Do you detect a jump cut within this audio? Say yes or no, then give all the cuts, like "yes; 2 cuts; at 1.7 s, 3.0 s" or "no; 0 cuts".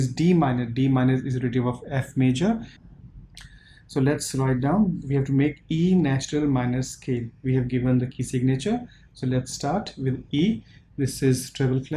yes; 1 cut; at 2.8 s